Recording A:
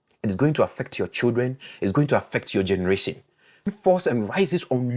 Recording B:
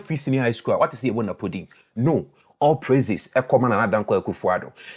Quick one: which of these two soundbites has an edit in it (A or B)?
A